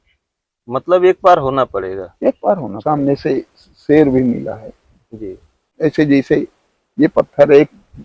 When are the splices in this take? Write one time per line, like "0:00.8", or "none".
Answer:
0:02.7
0:05.6